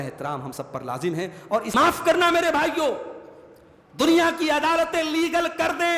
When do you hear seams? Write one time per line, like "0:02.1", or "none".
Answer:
0:01.7